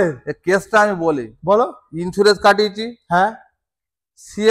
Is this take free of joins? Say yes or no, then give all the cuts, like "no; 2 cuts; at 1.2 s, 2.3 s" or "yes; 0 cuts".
yes; 0 cuts